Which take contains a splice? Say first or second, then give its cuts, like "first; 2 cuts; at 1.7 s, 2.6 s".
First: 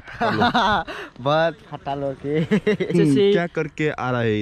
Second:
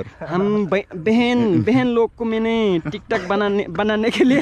first; 1 cut; at 2.9 s